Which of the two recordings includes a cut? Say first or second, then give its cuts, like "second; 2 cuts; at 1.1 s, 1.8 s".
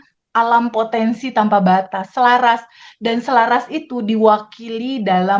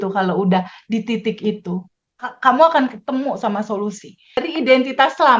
second; 1 cut; at 4.5 s